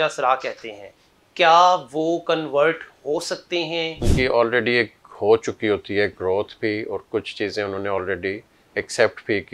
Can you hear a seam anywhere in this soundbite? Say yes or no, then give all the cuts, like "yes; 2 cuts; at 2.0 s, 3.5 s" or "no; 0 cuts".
yes; 1 cut; at 4.1 s